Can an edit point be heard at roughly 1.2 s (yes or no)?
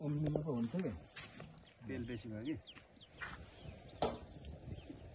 no